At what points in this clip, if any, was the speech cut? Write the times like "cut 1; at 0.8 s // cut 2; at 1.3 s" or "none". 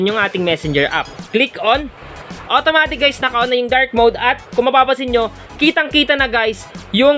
cut 1; at 1.2 s

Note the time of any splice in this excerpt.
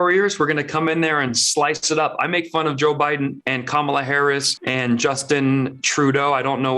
cut 1; at 3.4 s // cut 2; at 4.6 s

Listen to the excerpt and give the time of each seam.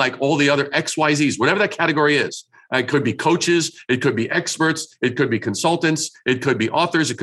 none

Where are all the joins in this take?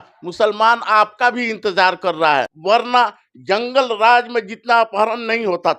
cut 1; at 2.5 s

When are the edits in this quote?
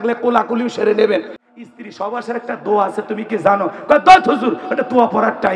cut 1; at 1.4 s

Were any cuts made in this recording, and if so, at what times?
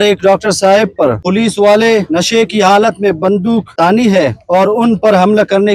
cut 1; at 1.2 s // cut 2; at 2.1 s // cut 3; at 3.7 s // cut 4; at 4.4 s

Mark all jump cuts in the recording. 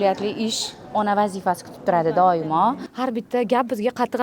cut 1; at 2.9 s

